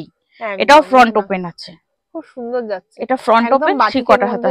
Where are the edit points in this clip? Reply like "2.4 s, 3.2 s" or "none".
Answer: none